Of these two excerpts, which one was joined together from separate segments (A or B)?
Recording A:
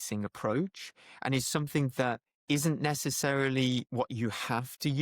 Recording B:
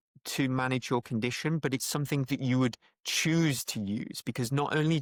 A